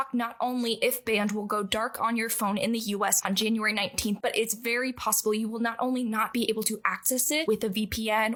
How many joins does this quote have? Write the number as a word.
zero